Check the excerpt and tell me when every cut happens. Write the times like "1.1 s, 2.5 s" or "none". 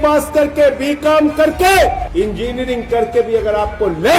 2.0 s